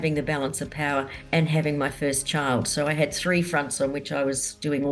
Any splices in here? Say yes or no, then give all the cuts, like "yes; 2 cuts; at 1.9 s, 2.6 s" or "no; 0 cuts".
no; 0 cuts